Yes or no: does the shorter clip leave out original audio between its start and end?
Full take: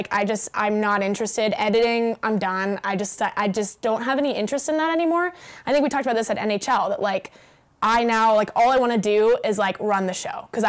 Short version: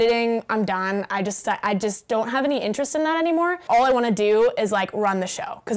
yes